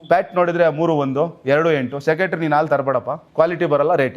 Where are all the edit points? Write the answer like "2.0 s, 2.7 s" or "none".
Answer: 3.2 s